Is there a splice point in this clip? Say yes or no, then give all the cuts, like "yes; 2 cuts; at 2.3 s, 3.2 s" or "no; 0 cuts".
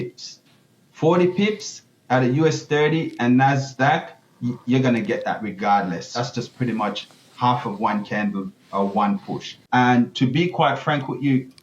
yes; 2 cuts; at 6.1 s, 9.8 s